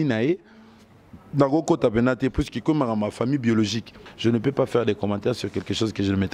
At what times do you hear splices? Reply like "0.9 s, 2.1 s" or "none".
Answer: 4.0 s